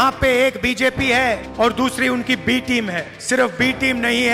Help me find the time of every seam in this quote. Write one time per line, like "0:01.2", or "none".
0:01.5
0:03.1